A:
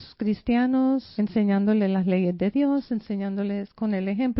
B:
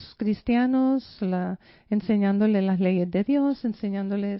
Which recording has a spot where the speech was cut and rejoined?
A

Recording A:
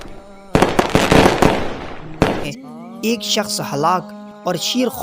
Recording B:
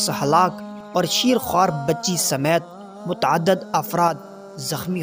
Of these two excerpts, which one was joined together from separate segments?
A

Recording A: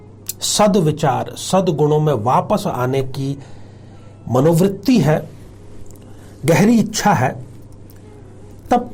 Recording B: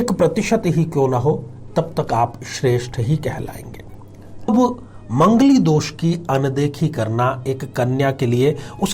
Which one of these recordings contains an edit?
B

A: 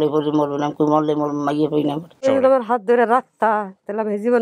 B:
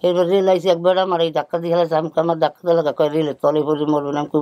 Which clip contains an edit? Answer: A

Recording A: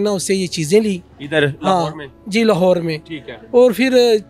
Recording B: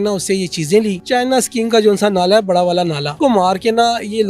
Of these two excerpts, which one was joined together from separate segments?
B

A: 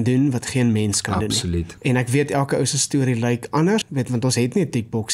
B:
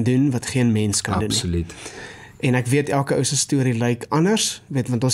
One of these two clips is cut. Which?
A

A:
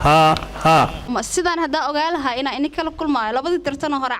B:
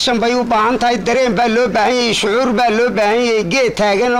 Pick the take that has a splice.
A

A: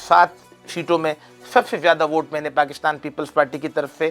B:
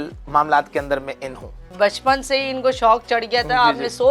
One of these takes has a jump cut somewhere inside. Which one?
B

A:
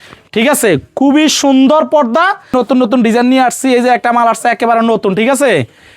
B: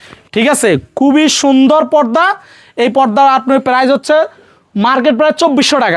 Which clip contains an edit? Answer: A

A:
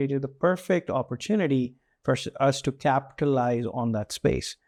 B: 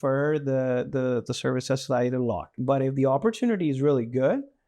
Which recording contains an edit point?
B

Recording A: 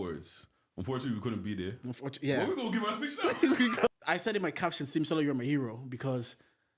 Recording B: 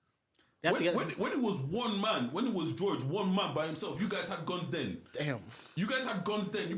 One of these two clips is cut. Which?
A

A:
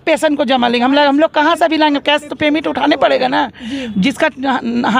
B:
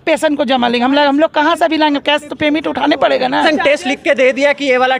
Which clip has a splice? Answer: B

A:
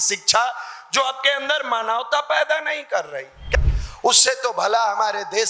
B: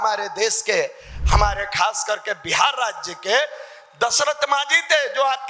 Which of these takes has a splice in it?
A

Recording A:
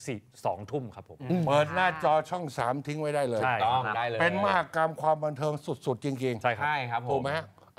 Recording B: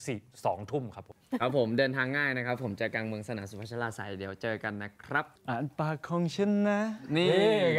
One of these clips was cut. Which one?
B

